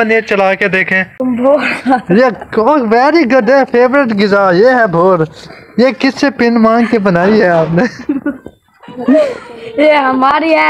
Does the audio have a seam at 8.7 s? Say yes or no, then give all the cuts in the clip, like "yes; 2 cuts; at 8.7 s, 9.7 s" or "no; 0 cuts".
no; 1 cut; at 1.2 s